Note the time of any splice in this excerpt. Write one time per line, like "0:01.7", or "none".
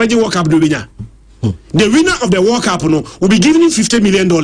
none